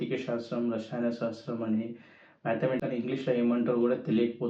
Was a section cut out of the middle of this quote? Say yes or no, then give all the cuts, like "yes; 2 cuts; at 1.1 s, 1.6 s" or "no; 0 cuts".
yes; 1 cut; at 2.8 s